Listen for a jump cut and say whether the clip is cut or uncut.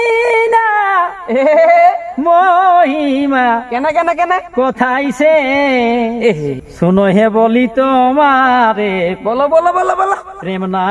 cut